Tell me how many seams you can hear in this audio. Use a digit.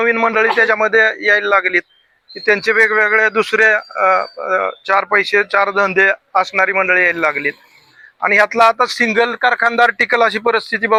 0